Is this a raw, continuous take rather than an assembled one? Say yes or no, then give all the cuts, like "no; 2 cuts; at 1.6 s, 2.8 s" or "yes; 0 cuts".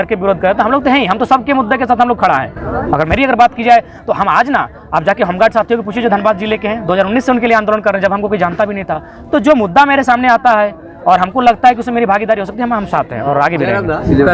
yes; 0 cuts